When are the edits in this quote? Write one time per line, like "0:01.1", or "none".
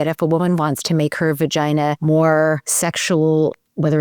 0:02.0
0:02.7